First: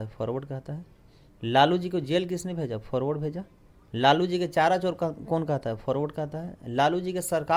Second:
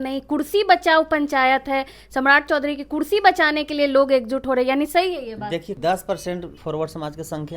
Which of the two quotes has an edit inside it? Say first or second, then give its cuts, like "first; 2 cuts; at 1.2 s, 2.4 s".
second; 2 cuts; at 5.7 s, 6.5 s